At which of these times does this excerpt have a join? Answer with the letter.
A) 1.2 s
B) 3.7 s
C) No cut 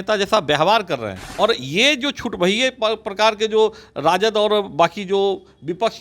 A